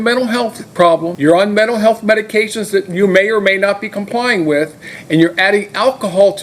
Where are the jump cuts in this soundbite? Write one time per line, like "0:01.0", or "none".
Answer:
0:01.1